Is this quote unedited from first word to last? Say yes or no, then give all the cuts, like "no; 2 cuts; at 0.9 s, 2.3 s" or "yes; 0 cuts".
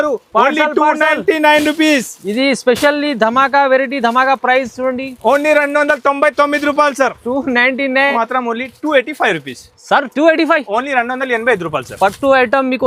no; 1 cut; at 8.1 s